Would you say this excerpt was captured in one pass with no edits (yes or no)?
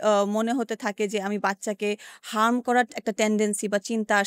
yes